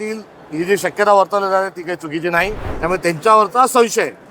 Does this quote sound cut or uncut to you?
cut